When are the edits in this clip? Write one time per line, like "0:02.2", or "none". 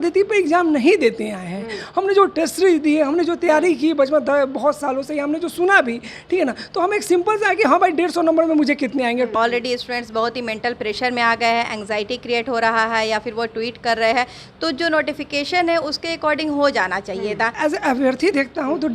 0:09.3
0:17.5